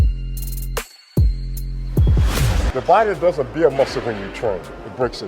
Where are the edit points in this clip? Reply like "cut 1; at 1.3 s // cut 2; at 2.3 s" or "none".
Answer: cut 1; at 2.6 s

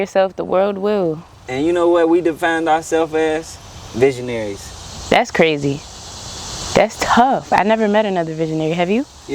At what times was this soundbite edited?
none

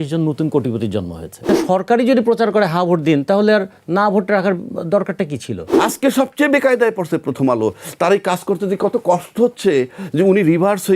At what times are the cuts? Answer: cut 1; at 1.6 s // cut 2; at 5.6 s

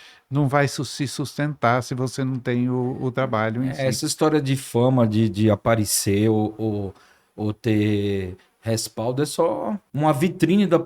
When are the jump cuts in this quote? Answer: cut 1; at 9.9 s

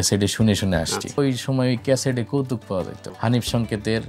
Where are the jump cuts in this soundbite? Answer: cut 1; at 1.2 s // cut 2; at 3.1 s

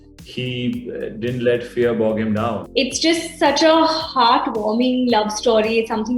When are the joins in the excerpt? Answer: cut 1; at 2.6 s

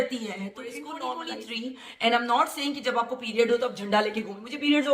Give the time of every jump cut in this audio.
cut 1; at 1.0 s

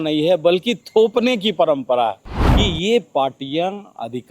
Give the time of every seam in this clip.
cut 1; at 2.3 s

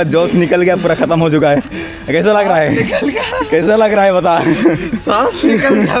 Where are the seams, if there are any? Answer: none

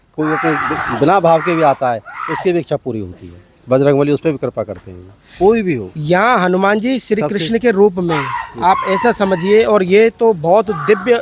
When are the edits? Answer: none

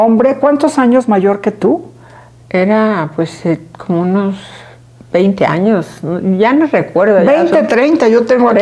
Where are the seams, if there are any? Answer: none

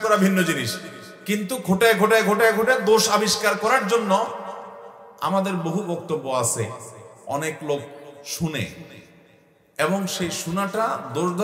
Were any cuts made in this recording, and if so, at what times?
none

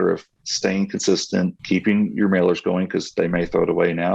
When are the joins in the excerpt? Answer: cut 1; at 1.6 s

